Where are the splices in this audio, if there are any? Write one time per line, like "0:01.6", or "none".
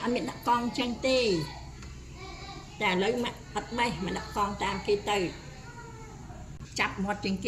0:06.2

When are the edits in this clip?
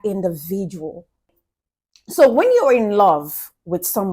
0:01.4

